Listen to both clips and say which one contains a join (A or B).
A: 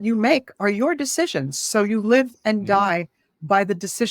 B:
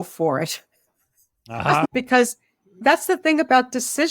B